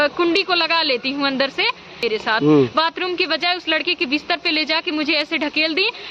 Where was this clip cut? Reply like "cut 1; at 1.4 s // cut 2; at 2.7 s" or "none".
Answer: cut 1; at 2.0 s

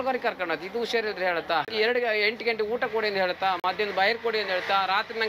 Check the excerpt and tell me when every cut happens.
cut 1; at 1.7 s

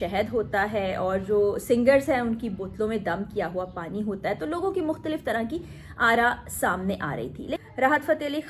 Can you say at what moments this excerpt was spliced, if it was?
cut 1; at 7.6 s

